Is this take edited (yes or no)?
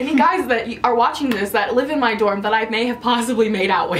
no